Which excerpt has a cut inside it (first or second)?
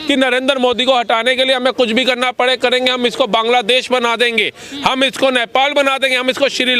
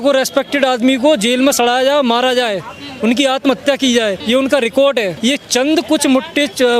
second